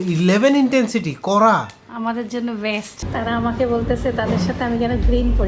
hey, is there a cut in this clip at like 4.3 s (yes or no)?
no